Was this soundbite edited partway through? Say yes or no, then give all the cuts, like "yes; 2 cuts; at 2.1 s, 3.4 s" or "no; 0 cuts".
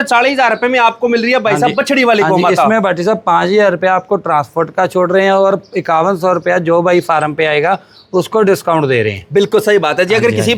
no; 0 cuts